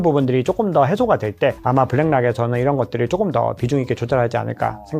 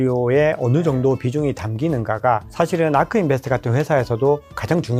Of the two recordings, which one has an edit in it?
first; 1 cut; at 1.6 s

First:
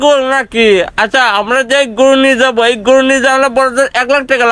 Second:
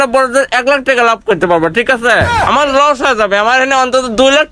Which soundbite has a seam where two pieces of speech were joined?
second; 1 cut; at 2.3 s

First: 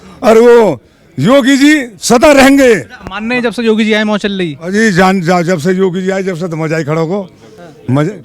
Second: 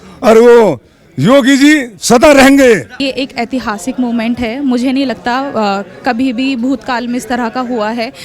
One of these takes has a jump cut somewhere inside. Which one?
second; 1 cut; at 2.9 s

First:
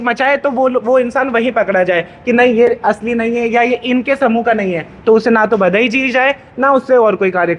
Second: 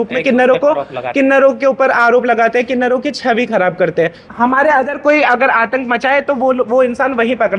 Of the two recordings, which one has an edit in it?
second; 1 cut; at 4.2 s

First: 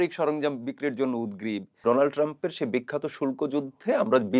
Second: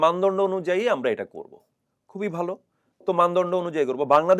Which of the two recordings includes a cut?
first; 1 cut; at 1.7 s

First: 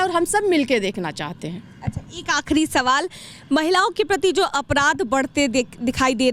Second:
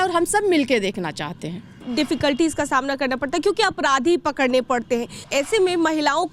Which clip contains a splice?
second; 2 cuts; at 1.8 s, 5.3 s

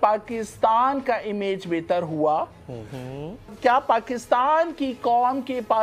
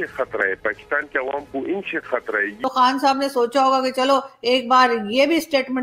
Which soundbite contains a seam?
second; 1 cut; at 2.5 s

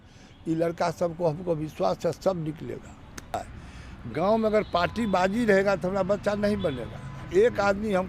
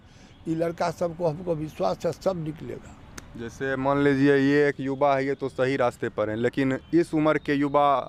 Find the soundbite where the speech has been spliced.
first; 1 cut; at 3.4 s

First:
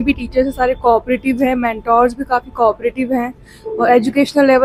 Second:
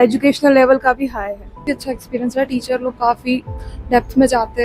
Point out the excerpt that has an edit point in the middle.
second; 1 cut; at 1.6 s

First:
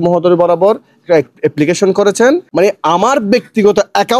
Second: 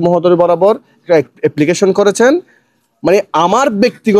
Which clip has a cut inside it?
first; 1 cut; at 2.5 s

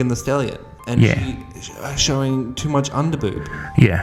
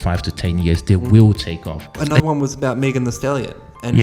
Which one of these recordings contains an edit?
second; 1 cut; at 1.9 s

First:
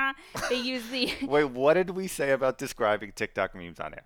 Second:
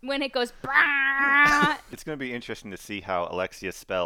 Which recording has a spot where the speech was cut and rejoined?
second; 1 cut; at 1.9 s

